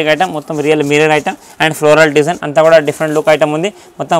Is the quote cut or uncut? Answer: uncut